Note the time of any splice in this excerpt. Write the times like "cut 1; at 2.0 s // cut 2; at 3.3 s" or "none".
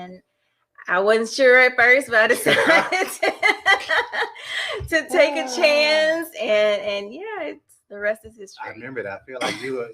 none